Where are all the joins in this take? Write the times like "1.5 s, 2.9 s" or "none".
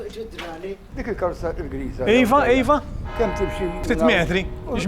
0.9 s, 3.8 s